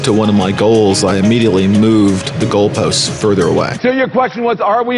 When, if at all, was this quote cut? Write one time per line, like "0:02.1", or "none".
0:03.7